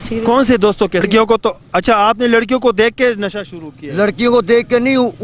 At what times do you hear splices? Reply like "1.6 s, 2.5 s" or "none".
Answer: 1.0 s